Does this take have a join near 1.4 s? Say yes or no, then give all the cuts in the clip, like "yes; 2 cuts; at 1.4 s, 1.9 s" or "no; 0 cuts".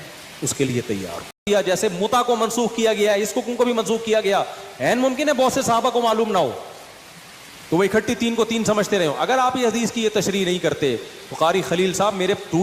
yes; 1 cut; at 1.4 s